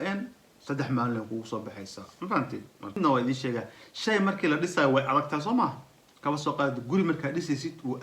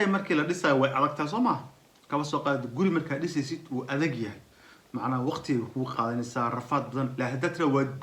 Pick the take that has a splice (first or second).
first